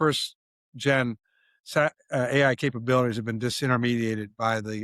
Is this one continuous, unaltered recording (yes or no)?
yes